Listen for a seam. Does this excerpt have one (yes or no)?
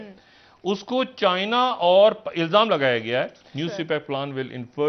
yes